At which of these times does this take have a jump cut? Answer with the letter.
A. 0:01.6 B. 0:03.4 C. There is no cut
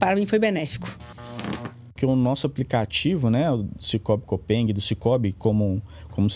A